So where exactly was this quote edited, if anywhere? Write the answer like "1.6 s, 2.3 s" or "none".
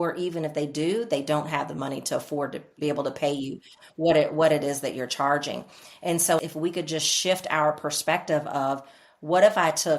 2.7 s, 6.4 s